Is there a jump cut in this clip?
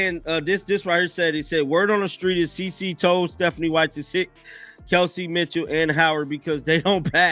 no; 0 cuts

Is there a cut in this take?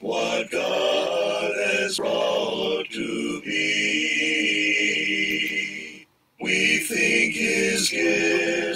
yes; 1 cut; at 1.9 s

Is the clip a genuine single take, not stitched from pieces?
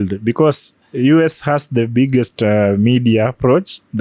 yes; 0 cuts

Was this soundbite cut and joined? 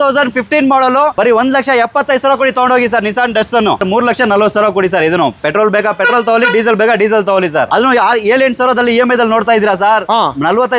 yes; 3 cuts; at 1.2 s, 3.8 s, 7.7 s

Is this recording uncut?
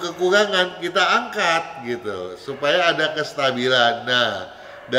yes; 0 cuts

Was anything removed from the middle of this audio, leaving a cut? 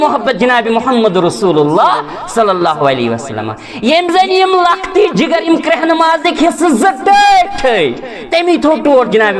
no; 0 cuts

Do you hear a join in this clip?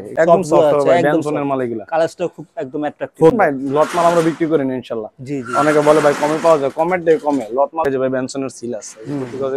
yes; 2 cuts; at 3.3 s, 7.8 s

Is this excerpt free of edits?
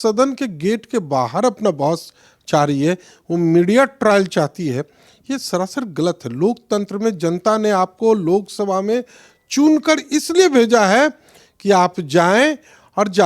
yes; 0 cuts

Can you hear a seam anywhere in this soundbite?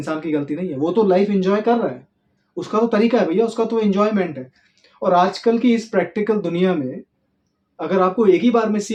no; 0 cuts

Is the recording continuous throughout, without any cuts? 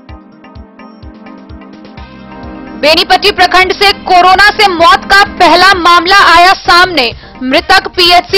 yes; 0 cuts

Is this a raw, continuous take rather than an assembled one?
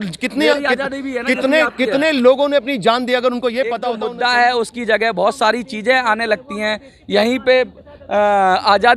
no; 1 cut; at 4.0 s

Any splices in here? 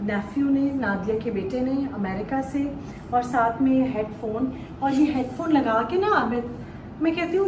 no; 0 cuts

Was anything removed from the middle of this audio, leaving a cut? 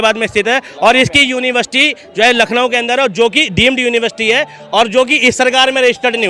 no; 0 cuts

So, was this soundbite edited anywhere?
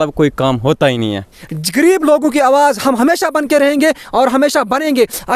yes; 1 cut; at 1.4 s

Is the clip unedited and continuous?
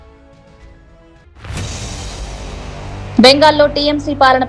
no; 2 cuts; at 1.2 s, 3.1 s

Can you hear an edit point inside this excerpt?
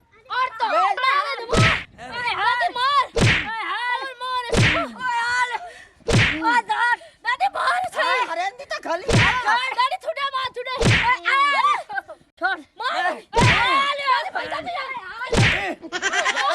yes; 1 cut; at 1.0 s

